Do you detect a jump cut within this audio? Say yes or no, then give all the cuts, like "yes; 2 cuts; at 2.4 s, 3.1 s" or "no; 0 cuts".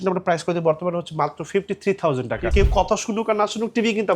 yes; 1 cut; at 2.5 s